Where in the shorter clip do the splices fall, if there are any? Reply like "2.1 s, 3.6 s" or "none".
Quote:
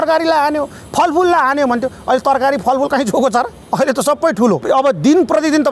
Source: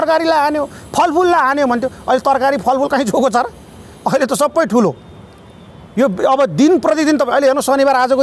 3.6 s, 4.6 s